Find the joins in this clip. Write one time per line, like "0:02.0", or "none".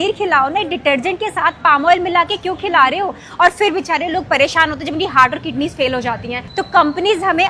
none